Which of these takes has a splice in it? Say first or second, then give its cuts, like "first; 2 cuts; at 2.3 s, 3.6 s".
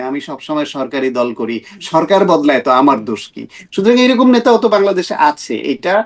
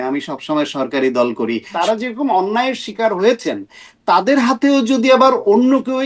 second; 1 cut; at 1.7 s